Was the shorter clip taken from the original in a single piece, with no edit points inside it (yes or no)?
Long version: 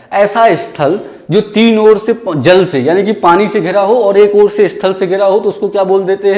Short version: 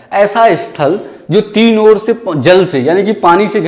yes